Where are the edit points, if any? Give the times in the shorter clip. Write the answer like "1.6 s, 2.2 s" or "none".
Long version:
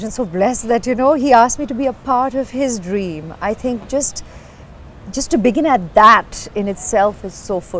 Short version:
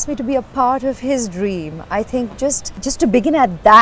2.7 s